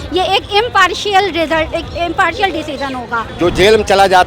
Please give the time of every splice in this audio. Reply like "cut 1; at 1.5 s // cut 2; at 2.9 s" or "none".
cut 1; at 3.3 s